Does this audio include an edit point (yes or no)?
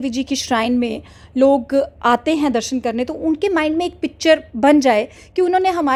no